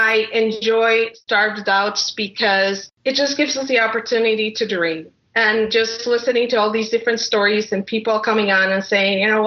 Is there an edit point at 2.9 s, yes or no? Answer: yes